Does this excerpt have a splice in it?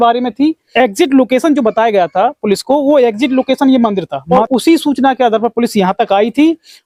no; 0 cuts

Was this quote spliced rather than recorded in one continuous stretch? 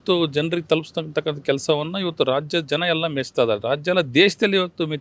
no; 0 cuts

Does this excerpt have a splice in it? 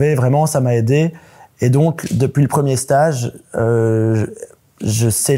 no; 0 cuts

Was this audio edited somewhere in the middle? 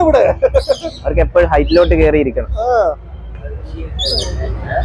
no; 0 cuts

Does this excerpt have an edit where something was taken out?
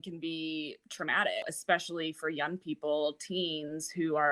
yes; 1 cut; at 1.5 s

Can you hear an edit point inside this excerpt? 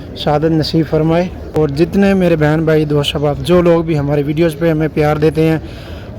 yes; 1 cut; at 1.4 s

